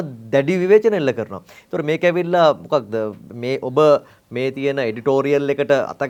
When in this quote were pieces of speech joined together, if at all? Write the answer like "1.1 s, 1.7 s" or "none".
none